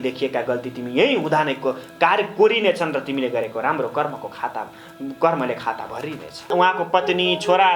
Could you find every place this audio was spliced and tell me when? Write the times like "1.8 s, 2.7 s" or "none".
6.5 s